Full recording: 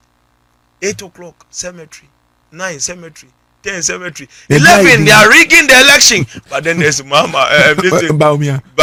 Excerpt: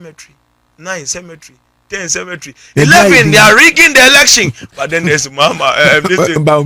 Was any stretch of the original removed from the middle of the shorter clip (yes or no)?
no